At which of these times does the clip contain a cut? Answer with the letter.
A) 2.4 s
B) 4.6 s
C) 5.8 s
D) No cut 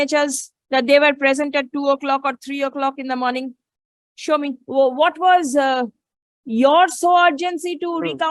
B